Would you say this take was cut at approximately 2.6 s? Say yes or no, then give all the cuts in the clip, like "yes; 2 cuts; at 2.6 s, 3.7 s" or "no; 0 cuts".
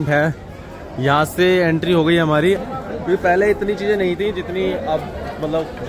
yes; 1 cut; at 2.6 s